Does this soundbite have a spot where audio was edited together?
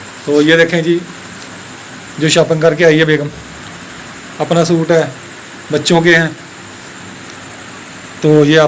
no; 0 cuts

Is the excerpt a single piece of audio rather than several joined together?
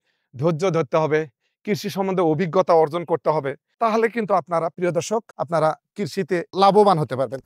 yes; 0 cuts

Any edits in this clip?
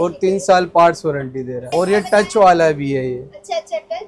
yes; 1 cut; at 1.5 s

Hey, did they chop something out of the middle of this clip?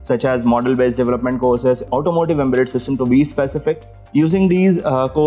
yes; 2 cuts; at 1.9 s, 3.9 s

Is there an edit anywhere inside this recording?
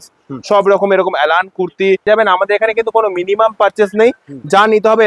yes; 1 cut; at 2.1 s

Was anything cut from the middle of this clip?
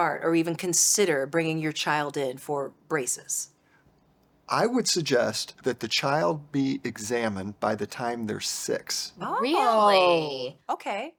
no; 0 cuts

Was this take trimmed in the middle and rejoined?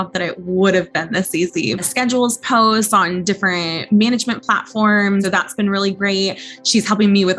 yes; 2 cuts; at 1.9 s, 5.3 s

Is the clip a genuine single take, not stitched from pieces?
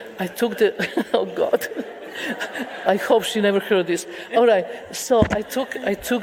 yes; 0 cuts

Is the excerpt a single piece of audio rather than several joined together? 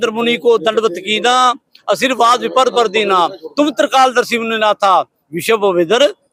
yes; 0 cuts

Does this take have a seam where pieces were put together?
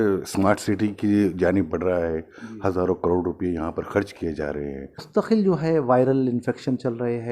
yes; 1 cut; at 5.1 s

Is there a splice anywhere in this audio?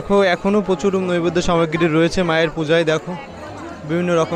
no; 0 cuts

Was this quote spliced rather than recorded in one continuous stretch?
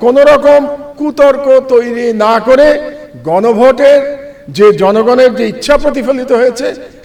no; 0 cuts

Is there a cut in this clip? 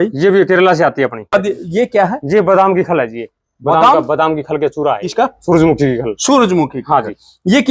yes; 2 cuts; at 1.3 s, 5.1 s

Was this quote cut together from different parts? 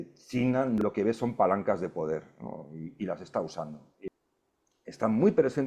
yes; 2 cuts; at 0.8 s, 4.1 s

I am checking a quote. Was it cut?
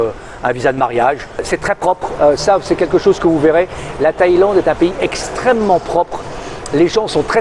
yes; 1 cut; at 1.4 s

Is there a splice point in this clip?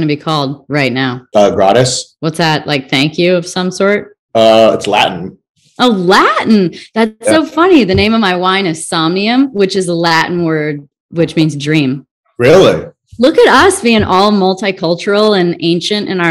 yes; 3 cuts; at 1.2 s, 2.1 s, 4.1 s

